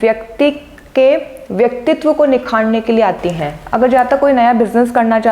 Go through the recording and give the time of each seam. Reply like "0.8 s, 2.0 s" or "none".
3.6 s